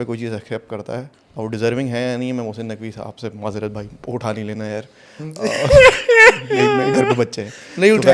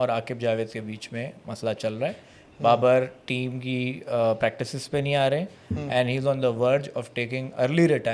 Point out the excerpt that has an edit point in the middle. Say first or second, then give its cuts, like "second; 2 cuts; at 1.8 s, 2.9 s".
first; 1 cut; at 1.2 s